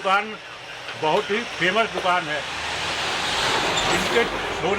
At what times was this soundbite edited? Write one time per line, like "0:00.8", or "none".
none